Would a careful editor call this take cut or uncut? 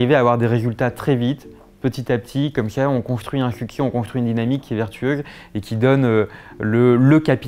uncut